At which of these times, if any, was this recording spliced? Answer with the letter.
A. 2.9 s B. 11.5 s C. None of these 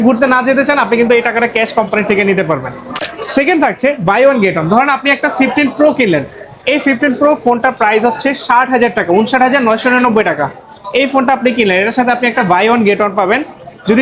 A